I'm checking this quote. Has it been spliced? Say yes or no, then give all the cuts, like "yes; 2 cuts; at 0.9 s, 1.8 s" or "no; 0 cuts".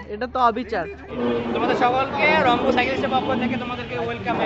yes; 1 cut; at 1.2 s